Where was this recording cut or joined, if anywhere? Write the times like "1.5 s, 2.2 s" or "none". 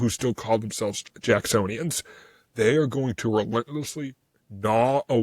1.1 s

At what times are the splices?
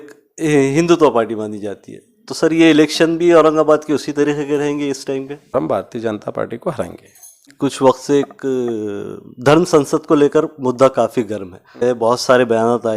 5.5 s, 7.5 s, 11.8 s

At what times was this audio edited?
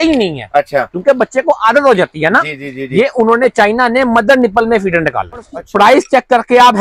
5.6 s

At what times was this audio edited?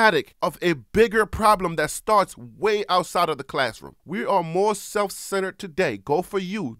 4.0 s

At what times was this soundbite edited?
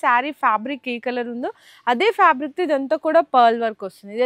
none

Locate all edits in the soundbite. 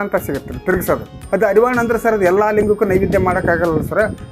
1.1 s

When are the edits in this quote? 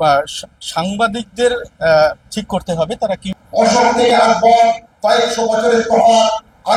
3.3 s

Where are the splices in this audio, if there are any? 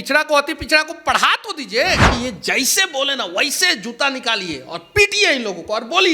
2.1 s

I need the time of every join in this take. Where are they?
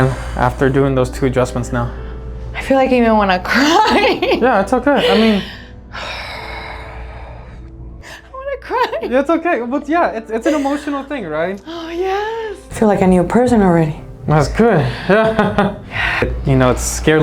8.0 s, 12.6 s, 16.2 s

